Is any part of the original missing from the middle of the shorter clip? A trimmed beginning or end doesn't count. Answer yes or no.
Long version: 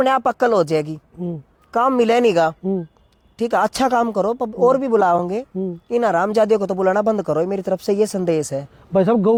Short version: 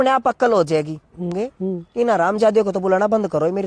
yes